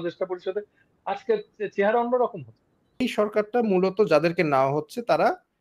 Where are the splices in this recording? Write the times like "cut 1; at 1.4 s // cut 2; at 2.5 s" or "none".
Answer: cut 1; at 3.0 s

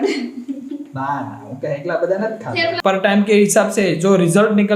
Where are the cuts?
cut 1; at 2.5 s

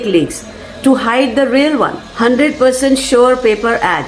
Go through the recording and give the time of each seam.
cut 1; at 2.0 s

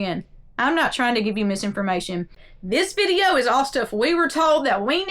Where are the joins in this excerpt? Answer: cut 1; at 2.5 s

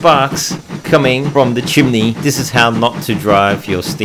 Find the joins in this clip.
cut 1; at 1.3 s // cut 2; at 2.2 s

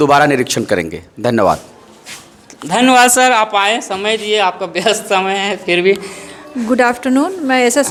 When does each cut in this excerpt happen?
none

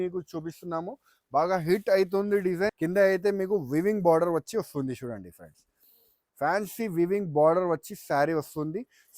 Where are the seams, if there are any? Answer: cut 1; at 2.7 s

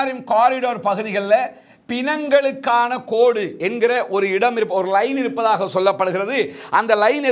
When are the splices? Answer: none

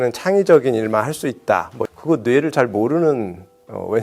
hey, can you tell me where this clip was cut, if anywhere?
cut 1; at 1.8 s

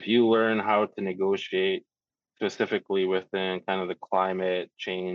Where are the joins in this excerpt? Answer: none

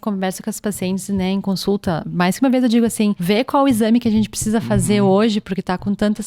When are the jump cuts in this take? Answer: cut 1; at 2.0 s // cut 2; at 3.2 s

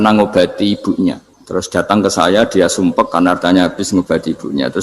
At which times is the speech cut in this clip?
cut 1; at 1.3 s

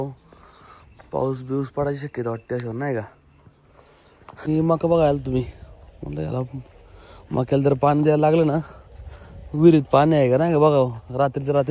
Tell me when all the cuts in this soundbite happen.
cut 1; at 4.5 s

